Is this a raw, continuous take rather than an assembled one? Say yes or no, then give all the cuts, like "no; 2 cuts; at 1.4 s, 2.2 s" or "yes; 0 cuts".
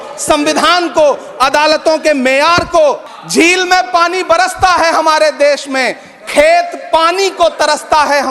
no; 1 cut; at 3.1 s